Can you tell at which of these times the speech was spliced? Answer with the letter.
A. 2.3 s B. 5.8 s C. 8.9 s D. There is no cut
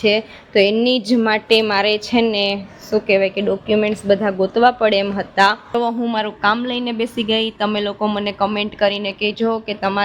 B